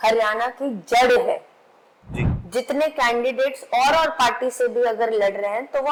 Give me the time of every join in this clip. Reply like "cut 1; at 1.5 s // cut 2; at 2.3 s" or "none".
none